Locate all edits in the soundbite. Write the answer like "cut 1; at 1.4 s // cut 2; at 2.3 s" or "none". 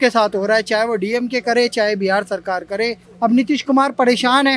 cut 1; at 3.0 s